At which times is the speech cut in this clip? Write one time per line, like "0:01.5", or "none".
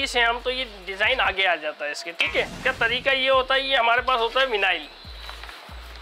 none